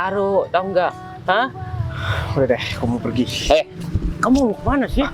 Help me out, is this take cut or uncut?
uncut